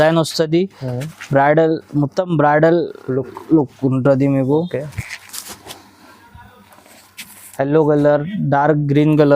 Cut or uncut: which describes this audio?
cut